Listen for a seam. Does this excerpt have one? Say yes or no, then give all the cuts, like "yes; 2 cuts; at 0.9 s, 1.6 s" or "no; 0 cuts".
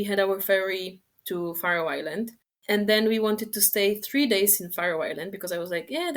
yes; 1 cut; at 2.5 s